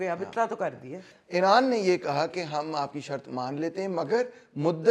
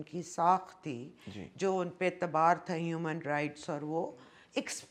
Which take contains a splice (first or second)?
first